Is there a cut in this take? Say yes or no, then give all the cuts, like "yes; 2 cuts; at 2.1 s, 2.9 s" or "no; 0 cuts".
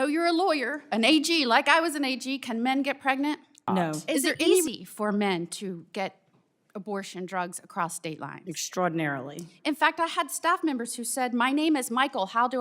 yes; 1 cut; at 4.7 s